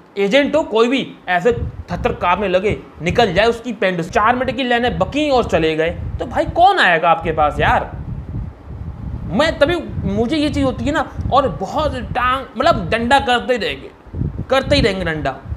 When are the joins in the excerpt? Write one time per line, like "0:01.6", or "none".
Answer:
0:04.0